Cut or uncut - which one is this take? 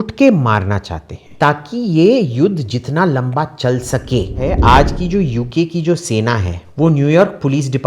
cut